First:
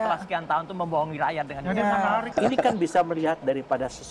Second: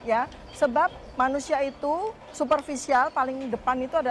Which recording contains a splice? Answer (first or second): first